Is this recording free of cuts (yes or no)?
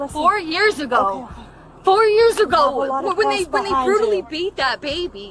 yes